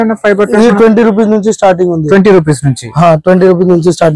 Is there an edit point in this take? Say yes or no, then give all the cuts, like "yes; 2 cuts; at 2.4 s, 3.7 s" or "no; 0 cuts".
no; 0 cuts